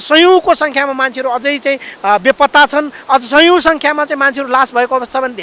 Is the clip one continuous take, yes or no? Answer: yes